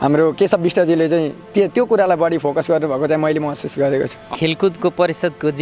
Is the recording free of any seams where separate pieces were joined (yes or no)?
no